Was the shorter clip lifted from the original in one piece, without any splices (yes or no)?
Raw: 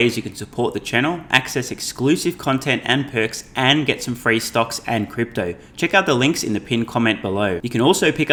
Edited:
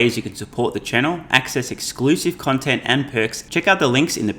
no